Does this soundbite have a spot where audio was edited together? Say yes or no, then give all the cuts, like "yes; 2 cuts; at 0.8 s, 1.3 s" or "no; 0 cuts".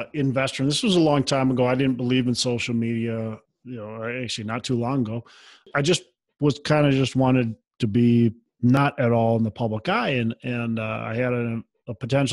yes; 3 cuts; at 3.5 s, 5.7 s, 8.8 s